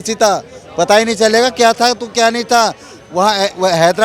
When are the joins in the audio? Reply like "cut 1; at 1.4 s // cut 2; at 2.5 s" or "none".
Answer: none